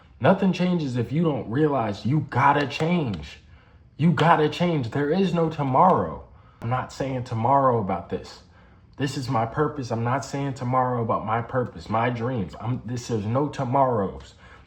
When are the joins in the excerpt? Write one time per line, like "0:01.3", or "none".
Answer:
0:06.6